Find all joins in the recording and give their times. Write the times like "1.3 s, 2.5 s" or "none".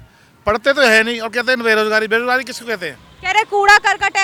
none